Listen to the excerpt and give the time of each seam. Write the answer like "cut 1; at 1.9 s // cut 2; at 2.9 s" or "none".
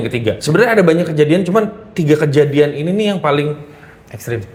none